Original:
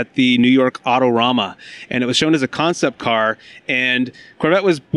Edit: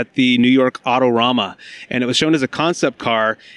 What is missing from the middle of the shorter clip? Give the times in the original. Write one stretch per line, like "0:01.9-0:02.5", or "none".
none